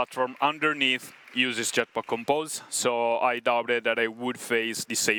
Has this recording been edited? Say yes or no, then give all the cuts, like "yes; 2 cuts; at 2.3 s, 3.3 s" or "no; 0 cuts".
no; 0 cuts